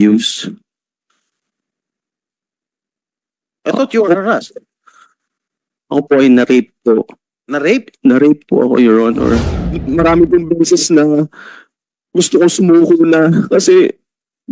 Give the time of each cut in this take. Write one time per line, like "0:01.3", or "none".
0:09.8